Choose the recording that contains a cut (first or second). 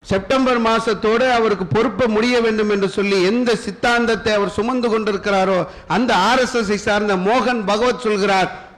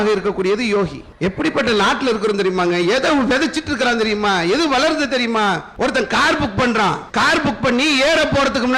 second